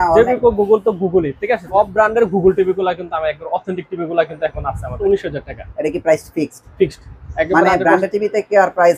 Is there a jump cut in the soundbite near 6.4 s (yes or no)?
no